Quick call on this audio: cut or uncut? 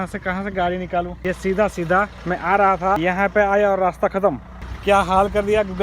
cut